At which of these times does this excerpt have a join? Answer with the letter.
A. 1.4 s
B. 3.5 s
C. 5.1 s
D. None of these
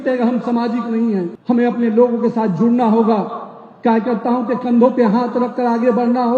A